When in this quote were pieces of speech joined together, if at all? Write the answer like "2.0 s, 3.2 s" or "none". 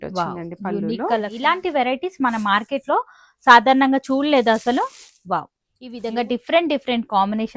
1.3 s, 6.0 s